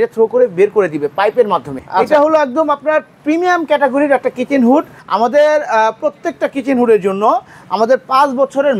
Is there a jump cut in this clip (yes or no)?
yes